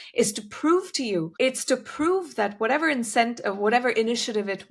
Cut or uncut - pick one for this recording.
cut